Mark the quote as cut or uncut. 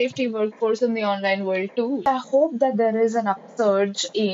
cut